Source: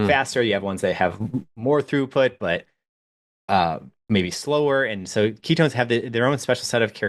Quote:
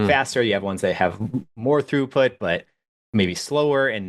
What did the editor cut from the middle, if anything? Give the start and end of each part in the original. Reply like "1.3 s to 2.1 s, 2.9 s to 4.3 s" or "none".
2.9 s to 3.9 s